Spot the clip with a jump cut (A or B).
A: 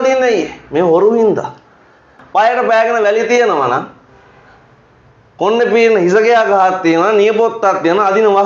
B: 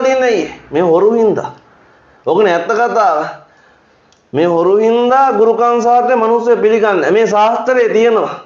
A